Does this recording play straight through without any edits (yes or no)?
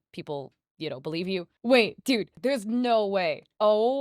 no